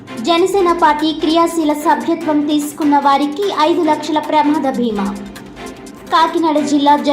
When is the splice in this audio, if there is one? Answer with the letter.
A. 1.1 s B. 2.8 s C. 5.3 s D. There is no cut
D